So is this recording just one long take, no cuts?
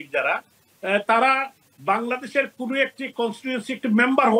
yes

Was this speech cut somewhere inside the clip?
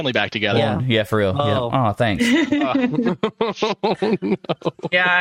no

